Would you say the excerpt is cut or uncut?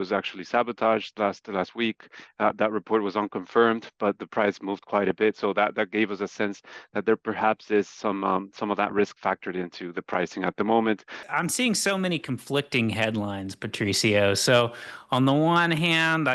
cut